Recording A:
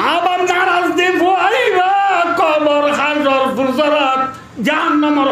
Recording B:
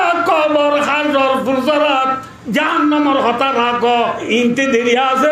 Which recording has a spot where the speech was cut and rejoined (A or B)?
B